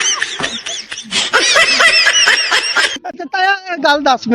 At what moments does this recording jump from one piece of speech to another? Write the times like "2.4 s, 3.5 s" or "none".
3.0 s

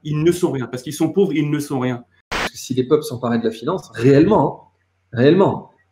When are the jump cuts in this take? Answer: 2.4 s

